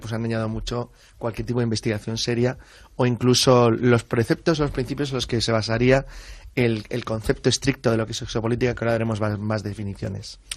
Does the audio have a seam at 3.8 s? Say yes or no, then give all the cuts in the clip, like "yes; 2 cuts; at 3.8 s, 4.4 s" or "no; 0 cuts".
no; 1 cut; at 7.0 s